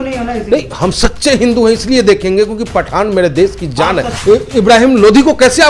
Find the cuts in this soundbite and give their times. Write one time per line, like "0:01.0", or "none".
0:04.1